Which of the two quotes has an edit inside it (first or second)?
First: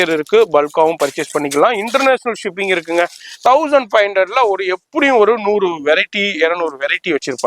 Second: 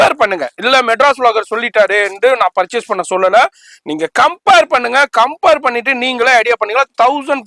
first